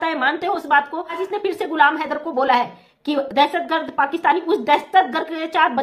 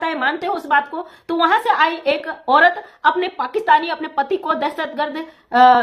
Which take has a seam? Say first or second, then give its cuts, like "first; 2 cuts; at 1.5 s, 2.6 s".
first; 1 cut; at 1.2 s